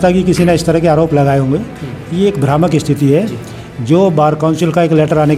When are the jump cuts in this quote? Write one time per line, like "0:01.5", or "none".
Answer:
none